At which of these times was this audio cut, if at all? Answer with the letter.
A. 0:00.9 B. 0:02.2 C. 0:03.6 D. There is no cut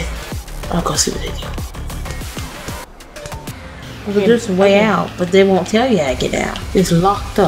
C